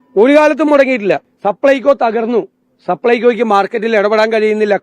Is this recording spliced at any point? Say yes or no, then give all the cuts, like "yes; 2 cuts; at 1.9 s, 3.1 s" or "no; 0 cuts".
yes; 1 cut; at 1.3 s